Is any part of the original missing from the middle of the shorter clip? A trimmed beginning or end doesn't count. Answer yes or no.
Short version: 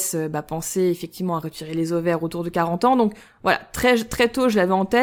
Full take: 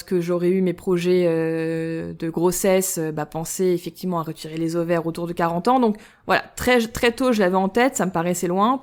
no